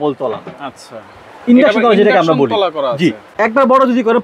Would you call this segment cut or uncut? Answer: cut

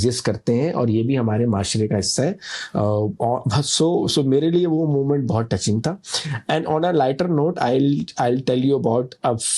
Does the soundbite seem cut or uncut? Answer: uncut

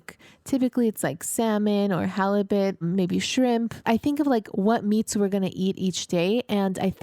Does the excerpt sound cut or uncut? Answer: cut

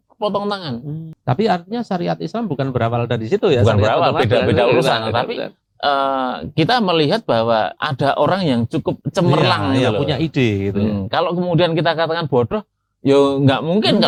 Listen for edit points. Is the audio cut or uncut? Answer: uncut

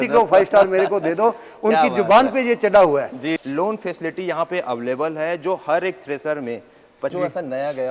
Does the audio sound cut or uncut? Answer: cut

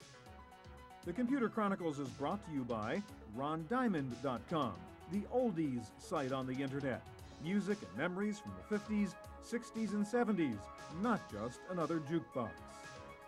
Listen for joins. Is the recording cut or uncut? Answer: cut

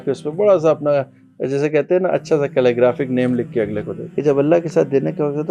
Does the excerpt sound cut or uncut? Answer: cut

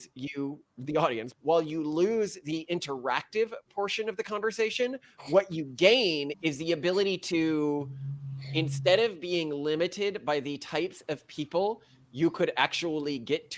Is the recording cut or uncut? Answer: cut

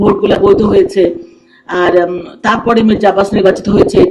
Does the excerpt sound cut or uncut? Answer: uncut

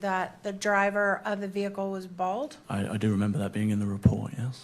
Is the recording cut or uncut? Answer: cut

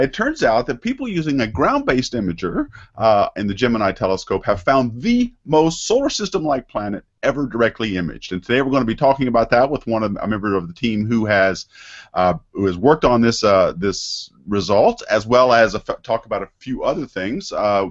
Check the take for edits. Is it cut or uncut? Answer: uncut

